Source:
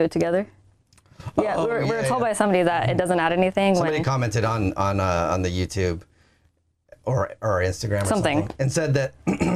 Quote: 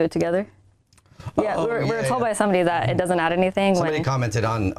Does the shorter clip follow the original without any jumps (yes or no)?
yes